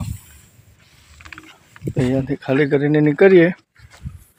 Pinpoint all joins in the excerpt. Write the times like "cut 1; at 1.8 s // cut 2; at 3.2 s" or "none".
none

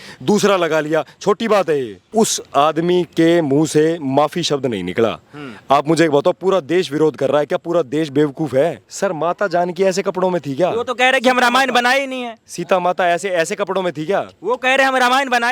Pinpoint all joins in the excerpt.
cut 1; at 2.0 s // cut 2; at 8.9 s

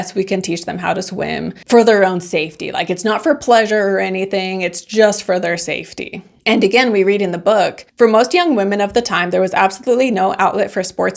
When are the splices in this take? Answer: none

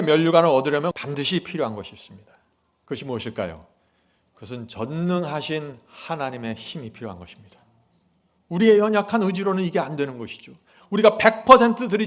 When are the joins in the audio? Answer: cut 1; at 1.0 s

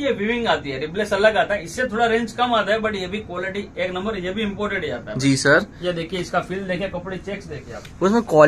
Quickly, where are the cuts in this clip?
none

